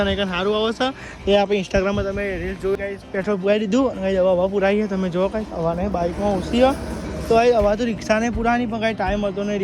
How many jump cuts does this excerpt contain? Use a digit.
1